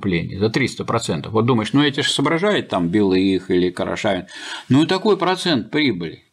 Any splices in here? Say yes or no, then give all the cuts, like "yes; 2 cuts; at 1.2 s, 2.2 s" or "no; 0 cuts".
no; 0 cuts